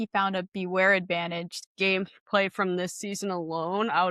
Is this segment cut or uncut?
cut